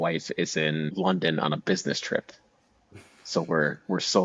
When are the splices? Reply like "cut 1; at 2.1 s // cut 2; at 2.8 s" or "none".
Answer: cut 1; at 0.9 s